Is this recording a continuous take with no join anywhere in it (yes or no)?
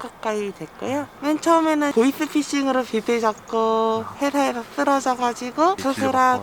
no